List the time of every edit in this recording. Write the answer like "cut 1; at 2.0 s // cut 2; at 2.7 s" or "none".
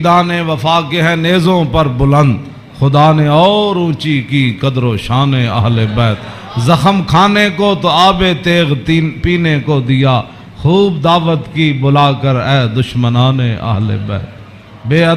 none